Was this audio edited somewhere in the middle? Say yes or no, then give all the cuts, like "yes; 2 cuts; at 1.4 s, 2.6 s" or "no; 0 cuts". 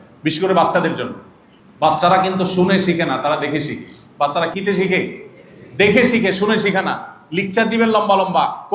yes; 1 cut; at 4.5 s